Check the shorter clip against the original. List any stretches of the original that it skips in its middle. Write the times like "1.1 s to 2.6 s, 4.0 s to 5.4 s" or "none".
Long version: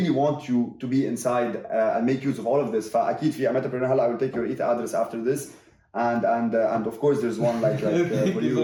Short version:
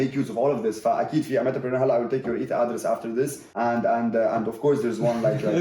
5.5 s to 5.8 s